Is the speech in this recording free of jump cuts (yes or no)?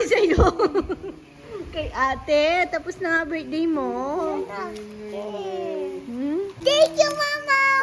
no